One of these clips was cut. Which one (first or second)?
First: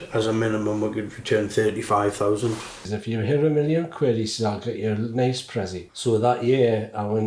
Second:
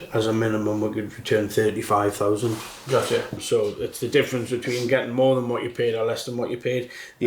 first